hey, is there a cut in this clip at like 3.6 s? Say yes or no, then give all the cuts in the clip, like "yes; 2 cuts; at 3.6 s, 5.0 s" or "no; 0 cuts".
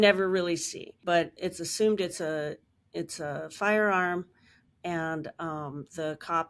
no; 1 cut; at 1.3 s